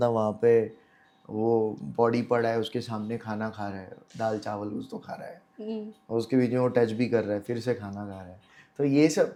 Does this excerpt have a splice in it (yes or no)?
no